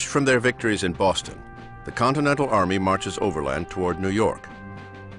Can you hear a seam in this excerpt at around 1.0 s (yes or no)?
yes